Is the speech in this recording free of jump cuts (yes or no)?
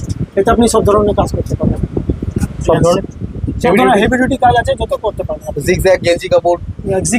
yes